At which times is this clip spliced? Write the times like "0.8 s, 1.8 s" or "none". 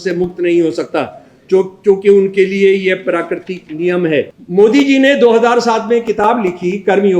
4.4 s